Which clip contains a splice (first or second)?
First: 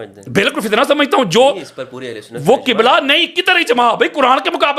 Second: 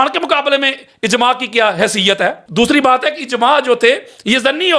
second